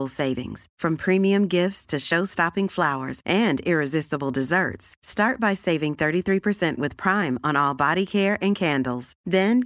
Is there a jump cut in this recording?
no; 0 cuts

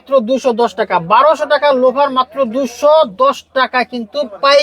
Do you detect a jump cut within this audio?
no; 0 cuts

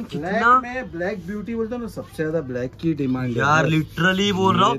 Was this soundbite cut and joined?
no; 0 cuts

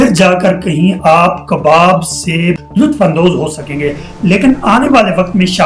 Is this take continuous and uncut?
no; 1 cut; at 2.6 s

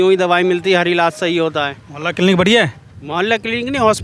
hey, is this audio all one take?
yes; 0 cuts

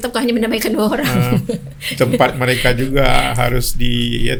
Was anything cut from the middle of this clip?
no; 0 cuts

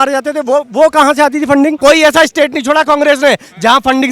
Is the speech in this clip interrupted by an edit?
yes; 1 cut; at 1.8 s

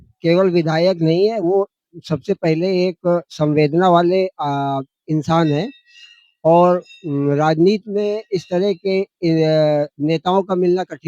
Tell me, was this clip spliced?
no; 0 cuts

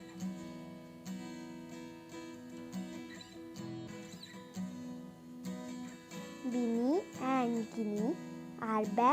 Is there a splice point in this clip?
no; 0 cuts

